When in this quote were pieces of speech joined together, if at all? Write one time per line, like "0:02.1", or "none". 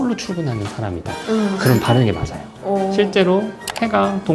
0:01.1